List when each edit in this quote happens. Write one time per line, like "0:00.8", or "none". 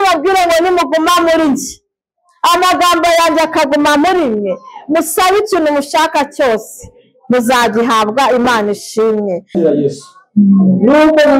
0:09.5